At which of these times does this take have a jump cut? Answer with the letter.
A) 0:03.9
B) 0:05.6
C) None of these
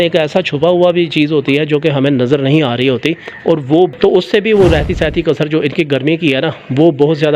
A